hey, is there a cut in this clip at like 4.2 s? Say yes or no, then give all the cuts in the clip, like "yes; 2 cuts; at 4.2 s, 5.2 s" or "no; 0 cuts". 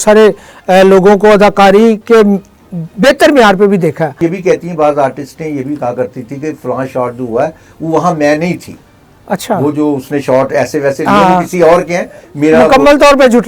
yes; 1 cut; at 4.2 s